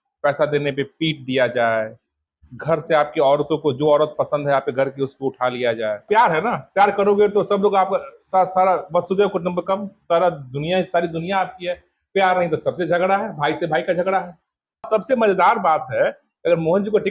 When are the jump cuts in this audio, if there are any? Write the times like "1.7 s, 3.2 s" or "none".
6.0 s, 14.9 s